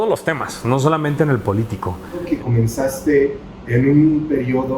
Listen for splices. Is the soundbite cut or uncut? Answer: cut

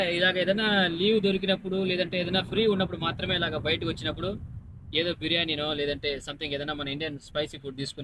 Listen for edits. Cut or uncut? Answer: uncut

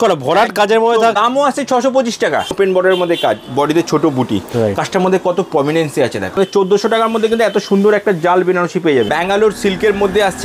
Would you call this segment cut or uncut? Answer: cut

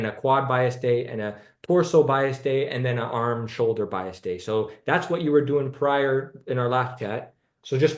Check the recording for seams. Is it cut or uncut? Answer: uncut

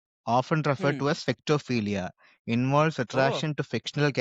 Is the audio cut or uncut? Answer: uncut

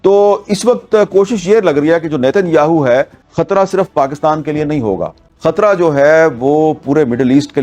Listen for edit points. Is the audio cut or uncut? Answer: cut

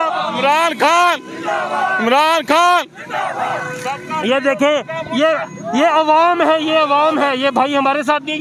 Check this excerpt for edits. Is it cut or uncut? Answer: uncut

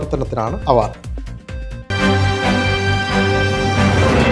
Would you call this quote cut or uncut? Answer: cut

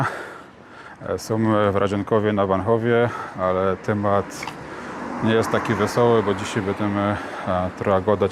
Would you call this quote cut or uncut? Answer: uncut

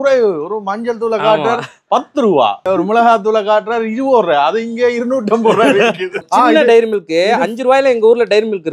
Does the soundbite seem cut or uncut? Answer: cut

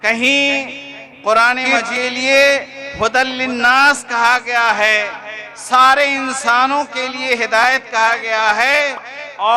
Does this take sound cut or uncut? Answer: cut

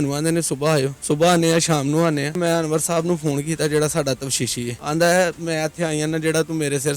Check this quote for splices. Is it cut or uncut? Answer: cut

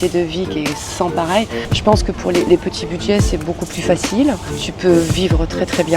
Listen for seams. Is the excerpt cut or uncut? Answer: cut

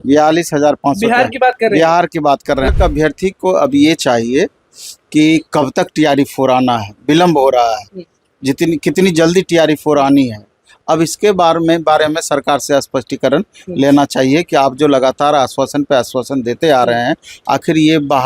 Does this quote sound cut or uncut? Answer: cut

